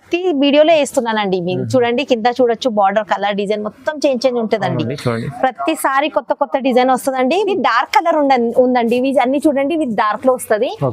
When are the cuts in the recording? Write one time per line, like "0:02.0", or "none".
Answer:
0:07.5